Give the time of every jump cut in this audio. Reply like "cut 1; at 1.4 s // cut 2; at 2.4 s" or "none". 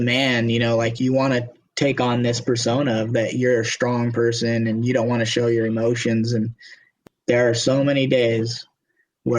cut 1; at 0.9 s // cut 2; at 6.9 s